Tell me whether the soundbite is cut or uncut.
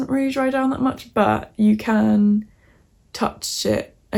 uncut